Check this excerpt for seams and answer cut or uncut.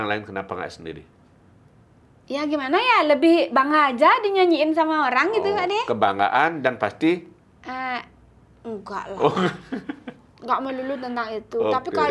uncut